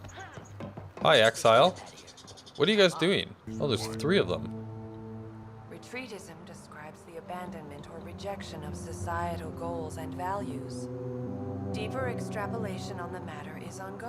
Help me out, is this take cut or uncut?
cut